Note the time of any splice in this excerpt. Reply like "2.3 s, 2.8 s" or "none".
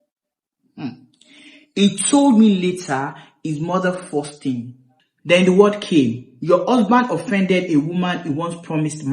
4.9 s